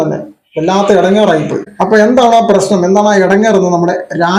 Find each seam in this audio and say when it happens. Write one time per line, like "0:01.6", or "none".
none